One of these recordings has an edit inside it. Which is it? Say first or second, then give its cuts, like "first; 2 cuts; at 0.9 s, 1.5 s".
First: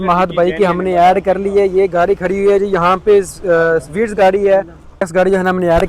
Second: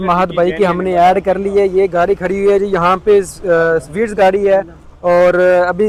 first; 1 cut; at 4.8 s